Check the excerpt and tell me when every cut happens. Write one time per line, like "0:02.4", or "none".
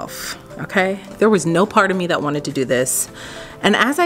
0:01.1